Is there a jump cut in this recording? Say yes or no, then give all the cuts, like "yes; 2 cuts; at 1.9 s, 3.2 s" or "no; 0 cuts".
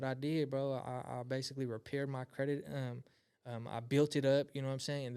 no; 0 cuts